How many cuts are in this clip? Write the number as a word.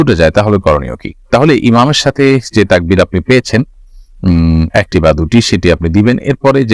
zero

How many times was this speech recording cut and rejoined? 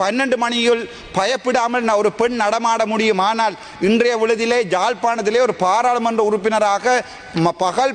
zero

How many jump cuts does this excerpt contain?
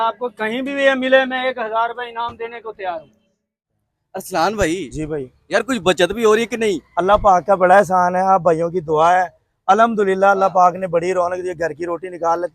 one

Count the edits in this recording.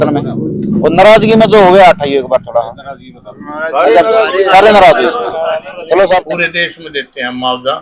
one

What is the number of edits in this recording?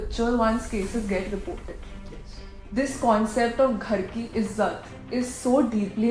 zero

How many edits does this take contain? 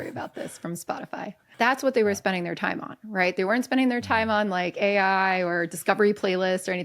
one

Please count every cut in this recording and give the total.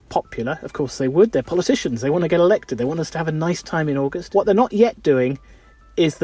one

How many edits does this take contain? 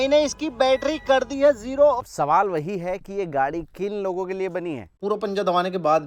two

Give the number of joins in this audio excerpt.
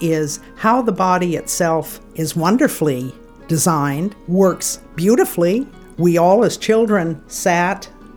three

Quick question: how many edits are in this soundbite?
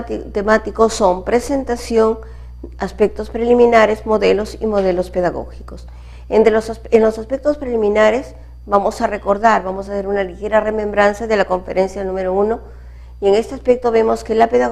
one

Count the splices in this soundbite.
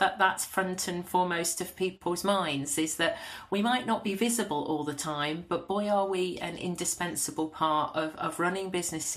zero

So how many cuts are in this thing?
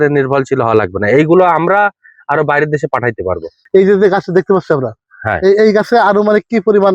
one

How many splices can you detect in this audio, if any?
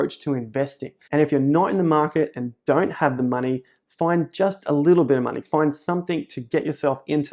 one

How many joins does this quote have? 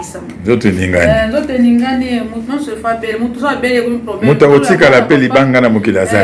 zero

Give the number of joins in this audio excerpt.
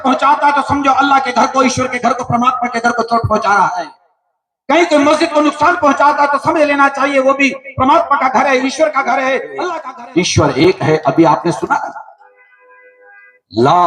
one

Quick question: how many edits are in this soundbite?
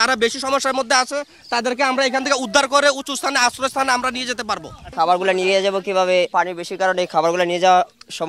two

